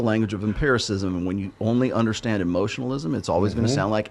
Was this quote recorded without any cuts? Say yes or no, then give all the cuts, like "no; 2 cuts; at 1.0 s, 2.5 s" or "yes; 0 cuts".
yes; 0 cuts